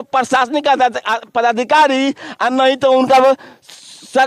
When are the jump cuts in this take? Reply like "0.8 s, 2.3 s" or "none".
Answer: none